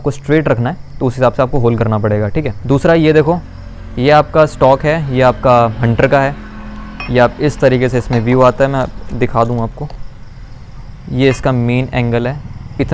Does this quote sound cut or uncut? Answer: uncut